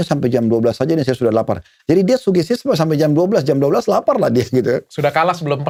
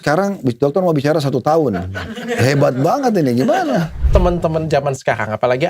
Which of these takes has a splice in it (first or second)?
second